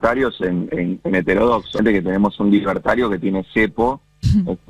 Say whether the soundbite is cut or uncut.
cut